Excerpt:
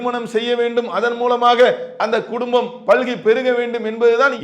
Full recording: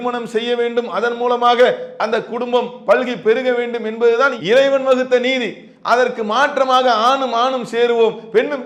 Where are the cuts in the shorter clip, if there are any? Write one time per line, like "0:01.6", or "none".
none